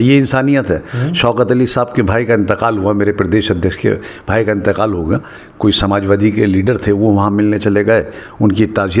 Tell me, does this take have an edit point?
no; 0 cuts

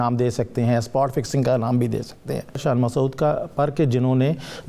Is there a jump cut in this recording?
yes; 1 cut; at 2.6 s

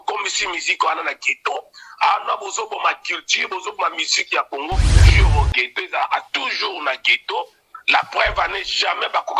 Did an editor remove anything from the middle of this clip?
yes; 1 cut; at 5.1 s

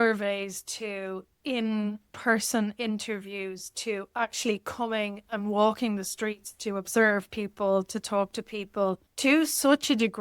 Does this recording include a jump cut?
yes; 1 cut; at 9.1 s

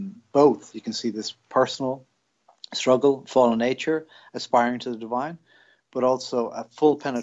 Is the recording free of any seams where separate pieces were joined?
yes; 0 cuts

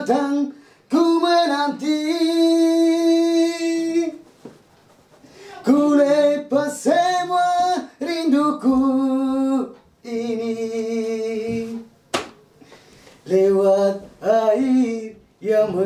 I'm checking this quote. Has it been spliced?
no; 0 cuts

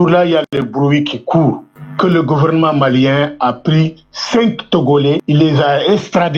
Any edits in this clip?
yes; 1 cut; at 5.2 s

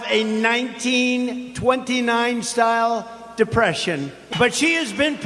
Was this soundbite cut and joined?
yes; 1 cut; at 4.2 s

